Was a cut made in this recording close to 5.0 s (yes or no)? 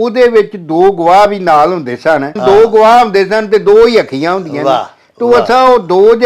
no